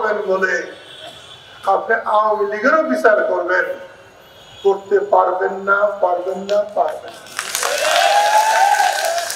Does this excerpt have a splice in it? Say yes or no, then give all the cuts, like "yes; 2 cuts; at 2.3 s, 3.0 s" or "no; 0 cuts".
no; 0 cuts